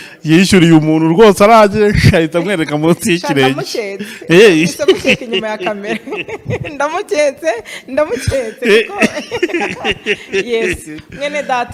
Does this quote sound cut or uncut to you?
uncut